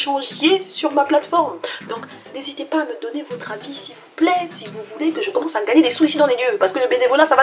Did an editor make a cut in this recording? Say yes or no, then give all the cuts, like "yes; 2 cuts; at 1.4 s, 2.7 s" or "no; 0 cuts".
no; 0 cuts